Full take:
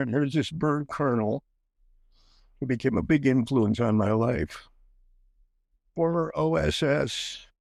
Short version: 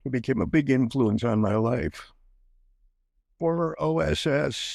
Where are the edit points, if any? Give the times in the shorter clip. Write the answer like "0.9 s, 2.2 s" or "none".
none